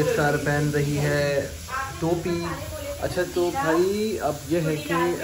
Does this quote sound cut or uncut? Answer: uncut